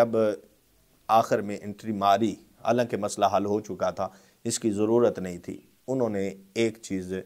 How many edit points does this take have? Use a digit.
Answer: 0